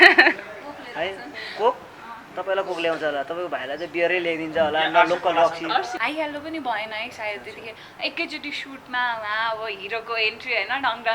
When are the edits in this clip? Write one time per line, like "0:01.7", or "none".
0:05.9

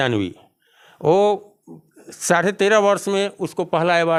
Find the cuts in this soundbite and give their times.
none

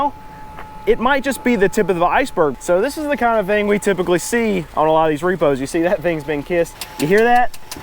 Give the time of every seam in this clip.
0:02.6
0:06.8

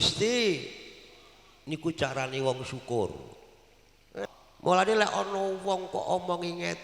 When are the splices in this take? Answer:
0:04.3

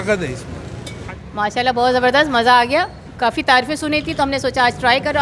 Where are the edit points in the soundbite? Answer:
0:01.0

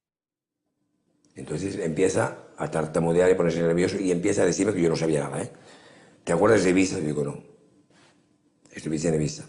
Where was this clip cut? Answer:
0:05.6

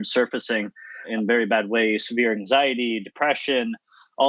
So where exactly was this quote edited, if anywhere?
0:01.1

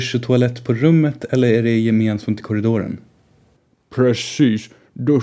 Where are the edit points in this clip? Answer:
0:03.4

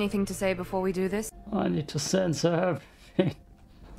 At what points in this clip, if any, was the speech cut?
0:01.4

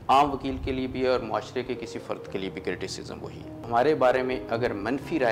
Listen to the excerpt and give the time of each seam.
0:03.6

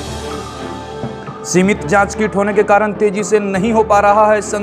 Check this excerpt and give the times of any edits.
0:01.1

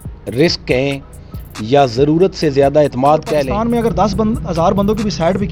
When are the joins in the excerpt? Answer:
0:03.5

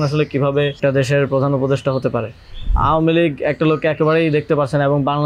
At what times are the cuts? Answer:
0:00.8
0:02.7

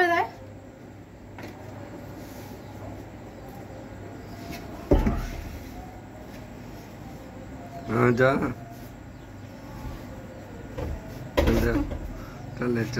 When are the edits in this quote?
none

